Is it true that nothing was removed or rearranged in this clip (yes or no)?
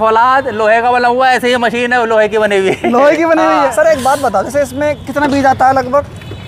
yes